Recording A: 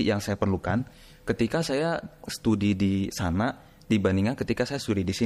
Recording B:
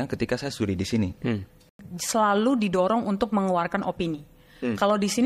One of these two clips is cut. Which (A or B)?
B